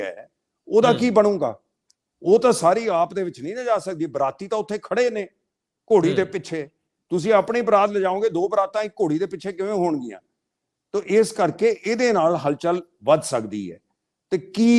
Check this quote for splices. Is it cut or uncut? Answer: uncut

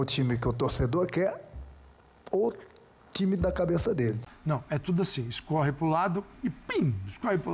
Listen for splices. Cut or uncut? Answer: cut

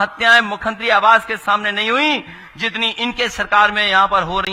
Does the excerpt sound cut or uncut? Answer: uncut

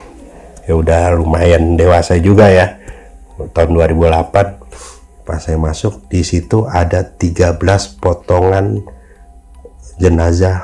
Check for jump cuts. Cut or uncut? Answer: uncut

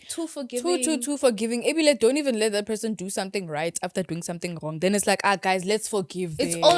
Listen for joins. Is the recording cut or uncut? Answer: uncut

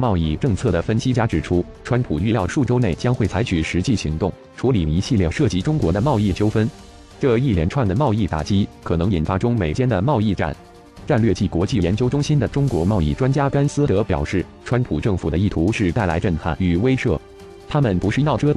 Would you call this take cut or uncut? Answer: cut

